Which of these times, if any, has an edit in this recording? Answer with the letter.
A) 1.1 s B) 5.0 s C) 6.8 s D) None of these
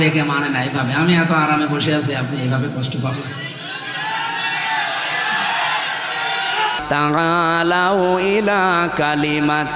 C